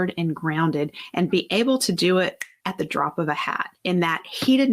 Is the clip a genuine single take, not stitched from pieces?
no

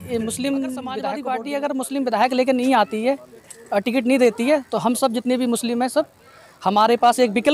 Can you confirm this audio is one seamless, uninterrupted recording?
no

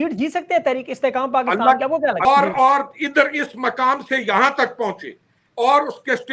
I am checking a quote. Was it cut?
yes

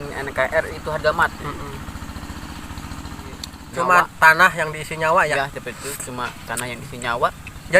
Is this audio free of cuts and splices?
no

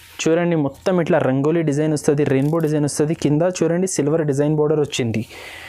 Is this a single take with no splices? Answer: yes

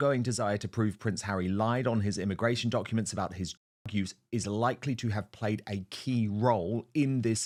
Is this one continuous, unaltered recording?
yes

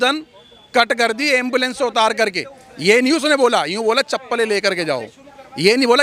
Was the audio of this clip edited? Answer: no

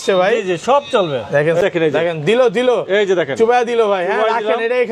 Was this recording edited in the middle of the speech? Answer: yes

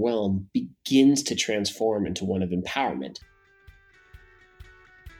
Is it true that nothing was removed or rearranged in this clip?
no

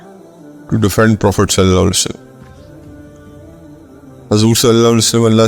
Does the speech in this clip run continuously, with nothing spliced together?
no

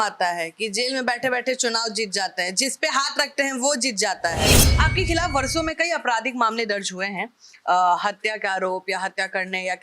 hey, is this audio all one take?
no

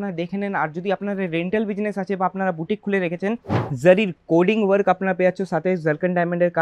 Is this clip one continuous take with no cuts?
no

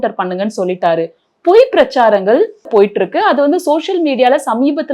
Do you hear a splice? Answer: yes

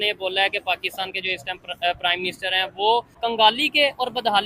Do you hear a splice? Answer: yes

